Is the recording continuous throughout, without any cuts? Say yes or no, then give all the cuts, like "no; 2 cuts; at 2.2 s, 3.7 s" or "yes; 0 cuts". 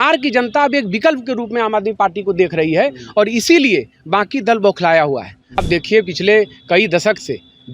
no; 1 cut; at 5.6 s